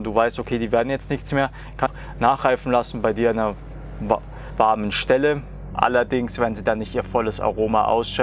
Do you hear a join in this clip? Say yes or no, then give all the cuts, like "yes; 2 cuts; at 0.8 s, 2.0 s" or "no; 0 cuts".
yes; 2 cuts; at 1.9 s, 5.6 s